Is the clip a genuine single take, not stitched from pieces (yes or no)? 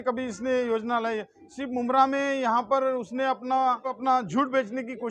no